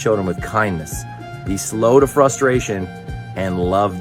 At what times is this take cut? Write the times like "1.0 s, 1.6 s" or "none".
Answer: 2.7 s